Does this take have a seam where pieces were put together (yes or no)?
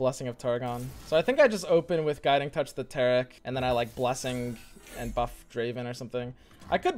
yes